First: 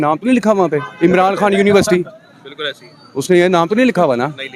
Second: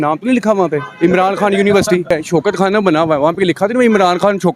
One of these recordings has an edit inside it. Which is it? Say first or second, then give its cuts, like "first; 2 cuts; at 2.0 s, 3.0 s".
second; 1 cut; at 2.1 s